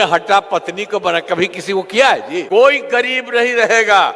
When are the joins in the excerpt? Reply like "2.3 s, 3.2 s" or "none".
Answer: 2.6 s

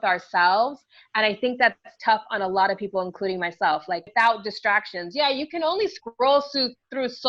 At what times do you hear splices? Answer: 4.1 s

